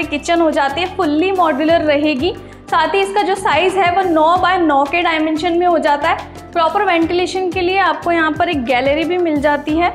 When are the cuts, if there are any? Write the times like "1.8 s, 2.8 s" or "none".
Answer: none